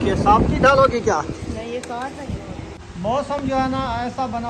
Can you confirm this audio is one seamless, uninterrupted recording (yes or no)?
no